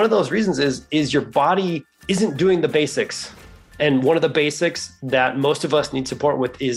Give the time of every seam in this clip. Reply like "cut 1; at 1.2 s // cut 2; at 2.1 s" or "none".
cut 1; at 1.9 s // cut 2; at 3.8 s